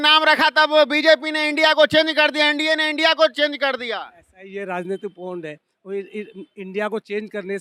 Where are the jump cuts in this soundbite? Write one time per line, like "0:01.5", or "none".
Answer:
none